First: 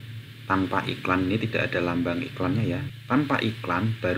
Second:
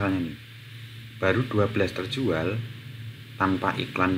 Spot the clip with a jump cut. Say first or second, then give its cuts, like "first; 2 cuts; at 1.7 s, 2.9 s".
first; 1 cut; at 2.9 s